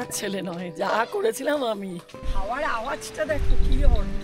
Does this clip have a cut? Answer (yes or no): yes